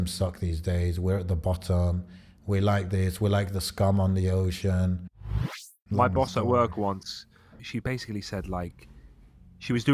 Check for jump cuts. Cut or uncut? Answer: cut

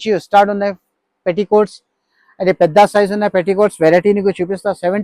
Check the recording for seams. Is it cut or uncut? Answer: uncut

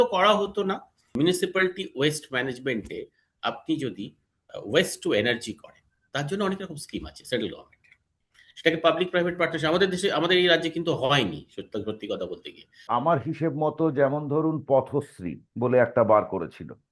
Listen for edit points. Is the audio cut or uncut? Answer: cut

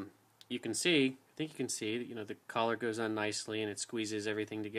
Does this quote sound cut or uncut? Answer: cut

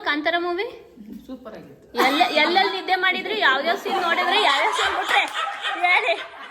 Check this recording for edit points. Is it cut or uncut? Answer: uncut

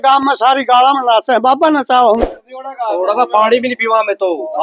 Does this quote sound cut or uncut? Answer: cut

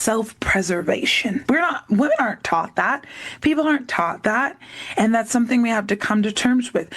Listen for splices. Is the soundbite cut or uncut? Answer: cut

